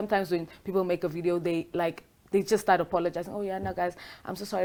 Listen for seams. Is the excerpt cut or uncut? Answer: uncut